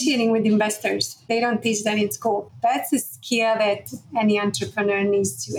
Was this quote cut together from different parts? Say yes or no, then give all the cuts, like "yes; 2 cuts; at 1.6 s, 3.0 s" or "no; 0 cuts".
yes; 2 cuts; at 1.3 s, 2.5 s